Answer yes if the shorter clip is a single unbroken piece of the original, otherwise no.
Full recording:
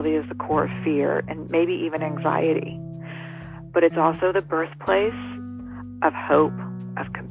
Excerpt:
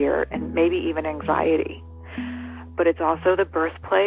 yes